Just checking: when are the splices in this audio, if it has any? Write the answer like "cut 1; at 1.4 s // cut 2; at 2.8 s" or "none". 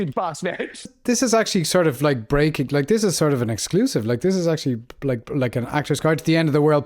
cut 1; at 1.0 s